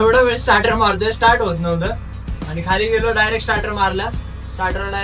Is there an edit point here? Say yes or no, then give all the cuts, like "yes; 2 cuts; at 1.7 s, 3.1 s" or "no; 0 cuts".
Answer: no; 0 cuts